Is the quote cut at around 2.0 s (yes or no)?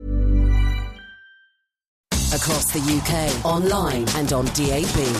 yes